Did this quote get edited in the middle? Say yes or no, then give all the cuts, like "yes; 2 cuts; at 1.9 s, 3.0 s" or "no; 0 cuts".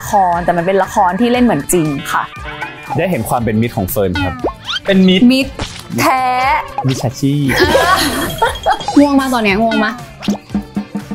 yes; 2 cuts; at 2.9 s, 8.8 s